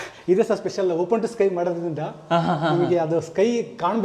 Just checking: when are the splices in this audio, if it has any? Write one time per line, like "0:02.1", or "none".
none